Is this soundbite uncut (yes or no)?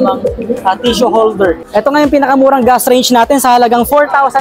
no